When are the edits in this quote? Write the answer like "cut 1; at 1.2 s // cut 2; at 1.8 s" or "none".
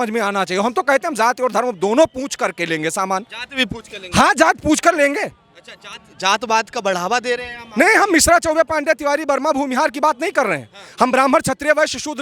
none